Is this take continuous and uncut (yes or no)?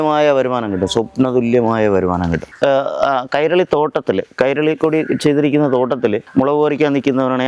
no